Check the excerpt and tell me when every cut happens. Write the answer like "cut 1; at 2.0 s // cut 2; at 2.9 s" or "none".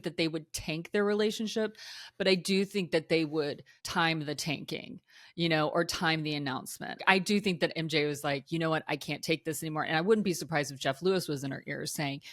cut 1; at 3.9 s // cut 2; at 7.0 s // cut 3; at 8.4 s